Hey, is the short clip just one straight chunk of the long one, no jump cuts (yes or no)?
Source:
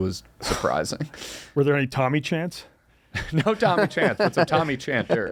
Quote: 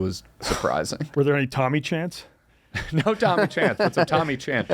no